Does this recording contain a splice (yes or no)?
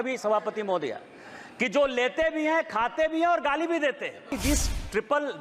yes